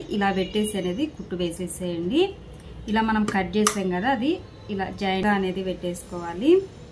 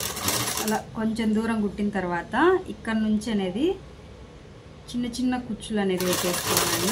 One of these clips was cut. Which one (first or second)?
first